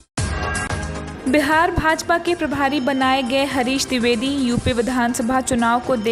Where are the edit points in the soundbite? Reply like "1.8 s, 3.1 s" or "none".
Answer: 1.1 s